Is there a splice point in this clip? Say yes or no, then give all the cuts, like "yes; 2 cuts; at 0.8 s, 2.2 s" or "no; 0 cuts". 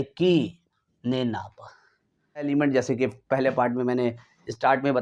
yes; 1 cut; at 2.5 s